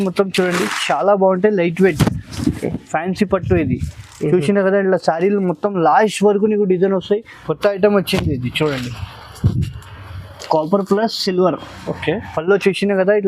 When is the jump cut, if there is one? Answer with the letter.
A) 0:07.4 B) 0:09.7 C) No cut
A